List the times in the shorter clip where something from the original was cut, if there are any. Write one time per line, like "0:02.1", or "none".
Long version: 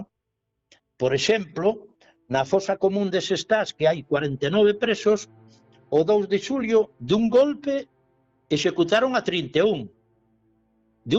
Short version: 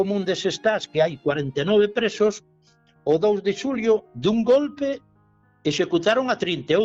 none